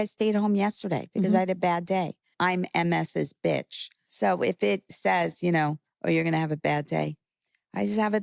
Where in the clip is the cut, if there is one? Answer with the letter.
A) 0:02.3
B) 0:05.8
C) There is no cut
A